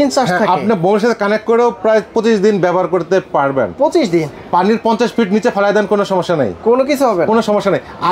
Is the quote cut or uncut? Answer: uncut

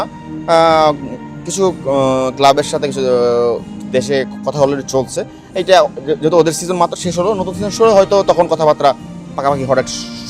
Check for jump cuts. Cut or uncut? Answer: uncut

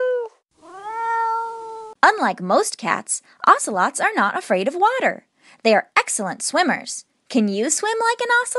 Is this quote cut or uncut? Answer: uncut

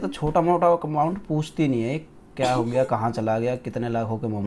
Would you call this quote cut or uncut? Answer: uncut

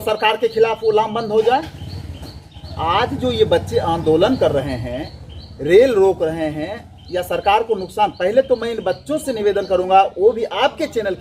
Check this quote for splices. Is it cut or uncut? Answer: uncut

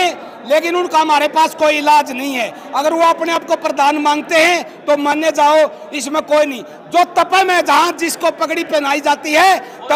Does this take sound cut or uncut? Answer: uncut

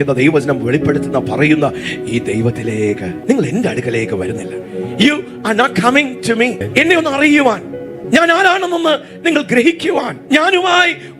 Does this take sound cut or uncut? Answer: uncut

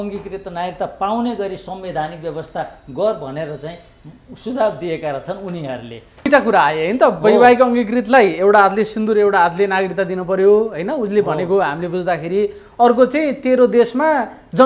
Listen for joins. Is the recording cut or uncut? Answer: cut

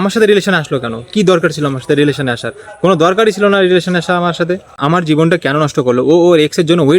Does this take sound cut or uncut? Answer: uncut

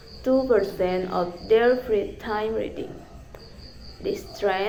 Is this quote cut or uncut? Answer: uncut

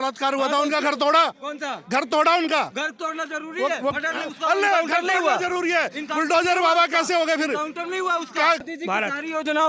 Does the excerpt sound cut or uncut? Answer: cut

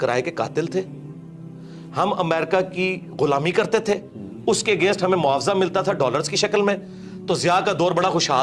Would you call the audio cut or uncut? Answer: uncut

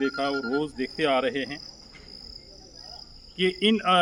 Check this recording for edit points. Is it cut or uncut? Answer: uncut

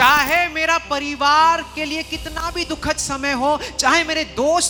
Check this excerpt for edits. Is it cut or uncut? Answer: uncut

